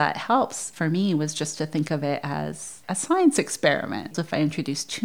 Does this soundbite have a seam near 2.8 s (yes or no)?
no